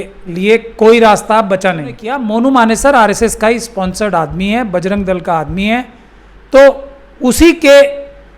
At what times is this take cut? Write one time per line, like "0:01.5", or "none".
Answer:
0:02.1